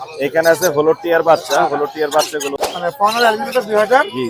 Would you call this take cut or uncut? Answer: cut